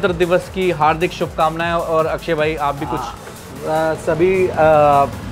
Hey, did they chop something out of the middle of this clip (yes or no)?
no